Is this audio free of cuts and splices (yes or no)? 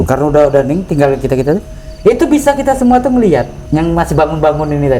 no